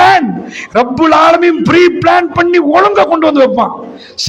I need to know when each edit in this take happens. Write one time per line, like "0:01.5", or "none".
none